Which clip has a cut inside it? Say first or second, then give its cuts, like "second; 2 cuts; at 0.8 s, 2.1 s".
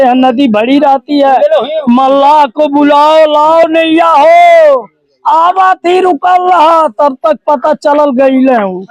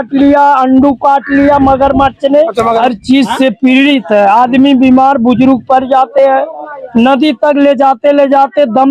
second; 1 cut; at 2.8 s